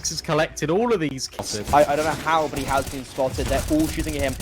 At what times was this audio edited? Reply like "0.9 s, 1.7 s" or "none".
1.2 s